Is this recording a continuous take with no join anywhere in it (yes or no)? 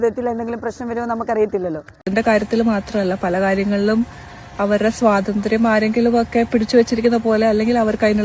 no